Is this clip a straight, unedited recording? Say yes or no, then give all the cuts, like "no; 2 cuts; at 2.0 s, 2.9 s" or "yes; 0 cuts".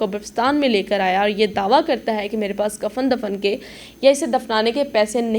yes; 0 cuts